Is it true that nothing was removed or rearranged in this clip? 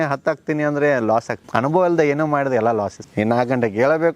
no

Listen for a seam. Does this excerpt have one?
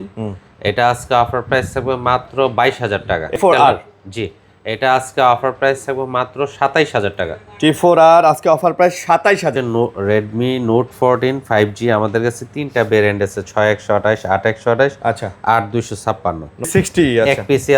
yes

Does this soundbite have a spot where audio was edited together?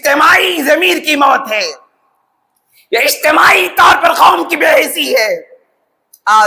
no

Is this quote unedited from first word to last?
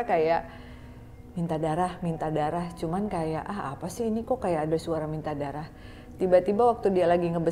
yes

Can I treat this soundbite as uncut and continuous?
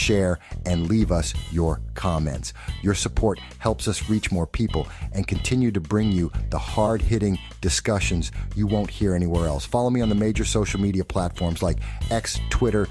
no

